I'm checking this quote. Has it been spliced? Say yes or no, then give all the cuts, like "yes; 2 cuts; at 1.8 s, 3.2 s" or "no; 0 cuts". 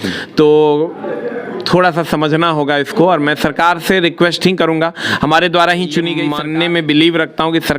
yes; 1 cut; at 6.3 s